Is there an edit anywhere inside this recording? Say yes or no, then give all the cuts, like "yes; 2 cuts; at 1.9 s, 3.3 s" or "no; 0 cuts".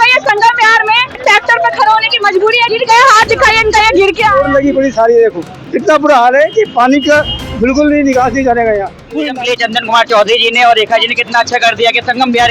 yes; 3 cuts; at 1.1 s, 2.7 s, 9.3 s